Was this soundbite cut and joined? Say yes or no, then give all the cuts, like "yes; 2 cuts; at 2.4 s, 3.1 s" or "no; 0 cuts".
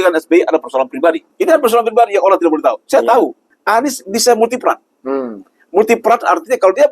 yes; 2 cuts; at 1.3 s, 3.5 s